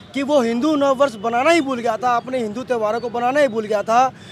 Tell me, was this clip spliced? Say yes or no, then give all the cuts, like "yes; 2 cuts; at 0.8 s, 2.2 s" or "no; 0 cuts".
no; 0 cuts